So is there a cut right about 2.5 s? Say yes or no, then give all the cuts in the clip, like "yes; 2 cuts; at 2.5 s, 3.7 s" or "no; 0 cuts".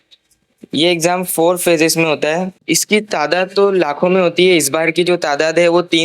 yes; 1 cut; at 2.5 s